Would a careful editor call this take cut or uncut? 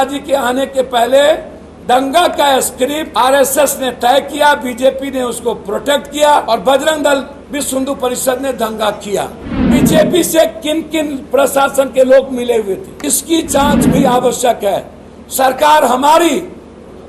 cut